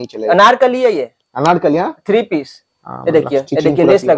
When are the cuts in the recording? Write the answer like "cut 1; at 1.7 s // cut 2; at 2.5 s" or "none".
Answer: none